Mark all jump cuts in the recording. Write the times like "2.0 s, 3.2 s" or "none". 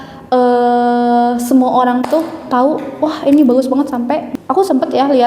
4.3 s